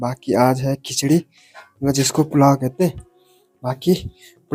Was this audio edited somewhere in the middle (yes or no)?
no